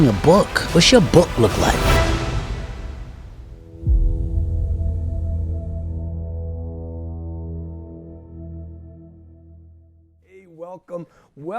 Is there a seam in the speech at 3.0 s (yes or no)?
no